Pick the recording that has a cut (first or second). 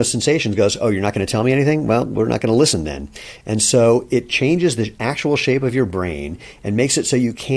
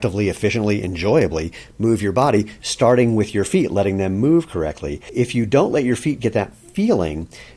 second